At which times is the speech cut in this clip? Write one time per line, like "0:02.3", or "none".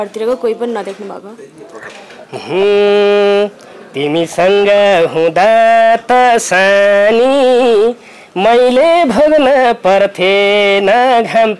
0:01.9